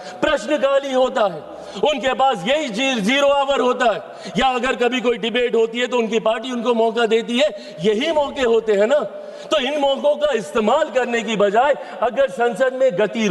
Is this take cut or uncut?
uncut